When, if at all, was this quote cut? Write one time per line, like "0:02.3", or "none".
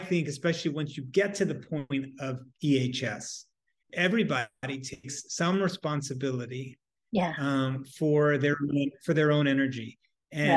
0:03.7